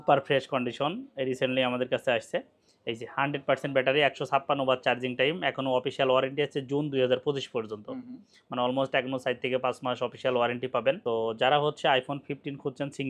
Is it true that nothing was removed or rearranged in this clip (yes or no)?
yes